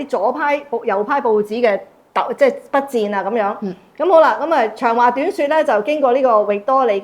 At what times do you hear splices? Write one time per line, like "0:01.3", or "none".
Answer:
none

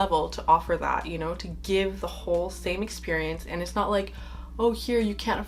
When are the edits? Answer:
none

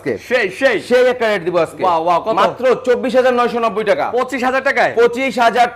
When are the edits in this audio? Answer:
none

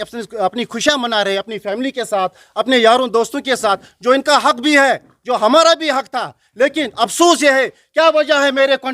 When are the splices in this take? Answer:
none

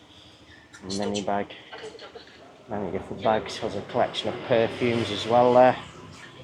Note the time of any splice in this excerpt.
none

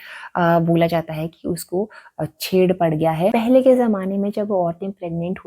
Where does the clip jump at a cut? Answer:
0:03.0

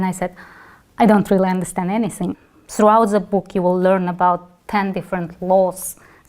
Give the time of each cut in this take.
0:02.3

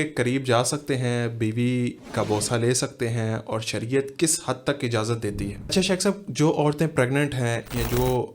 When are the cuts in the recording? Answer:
0:05.5

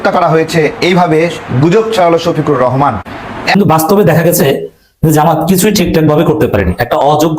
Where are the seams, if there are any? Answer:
0:03.6

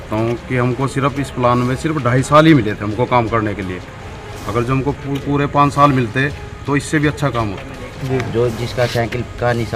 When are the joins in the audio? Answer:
0:08.0

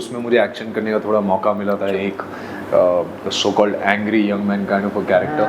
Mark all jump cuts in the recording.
none

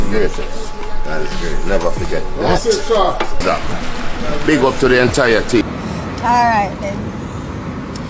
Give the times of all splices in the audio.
0:05.6

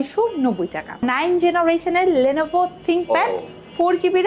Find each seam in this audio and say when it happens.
0:01.0

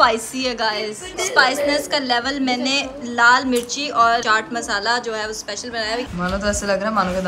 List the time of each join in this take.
0:01.1
0:04.2
0:06.1

